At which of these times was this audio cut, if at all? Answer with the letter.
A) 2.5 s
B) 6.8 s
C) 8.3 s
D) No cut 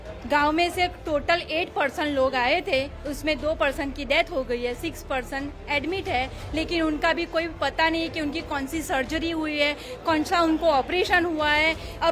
D